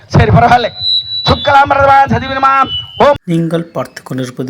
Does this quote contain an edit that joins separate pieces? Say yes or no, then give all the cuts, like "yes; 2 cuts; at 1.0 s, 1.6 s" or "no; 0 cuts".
yes; 1 cut; at 3.2 s